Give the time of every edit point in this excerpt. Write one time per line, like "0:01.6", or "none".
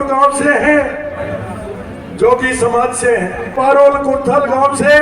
0:03.5